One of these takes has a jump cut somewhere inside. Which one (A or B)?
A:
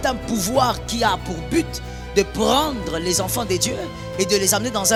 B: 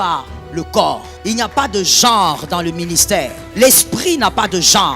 B